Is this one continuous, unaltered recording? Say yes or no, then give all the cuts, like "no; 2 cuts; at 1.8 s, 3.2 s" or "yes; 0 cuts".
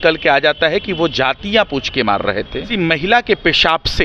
no; 1 cut; at 2.7 s